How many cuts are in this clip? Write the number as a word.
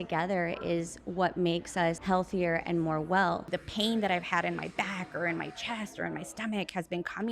two